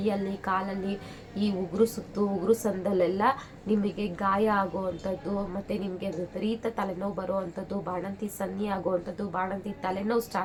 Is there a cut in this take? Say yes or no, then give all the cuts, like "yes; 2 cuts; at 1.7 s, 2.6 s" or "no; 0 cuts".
no; 0 cuts